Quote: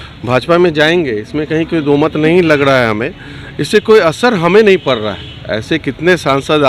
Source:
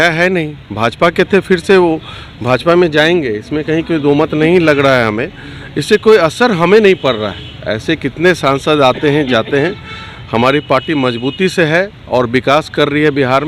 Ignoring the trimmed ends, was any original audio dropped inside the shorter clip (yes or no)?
no